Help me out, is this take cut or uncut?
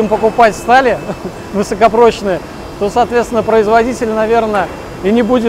uncut